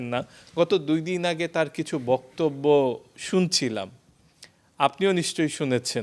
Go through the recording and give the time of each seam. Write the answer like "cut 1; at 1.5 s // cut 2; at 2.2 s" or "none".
none